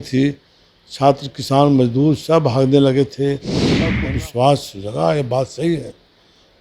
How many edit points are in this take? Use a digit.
1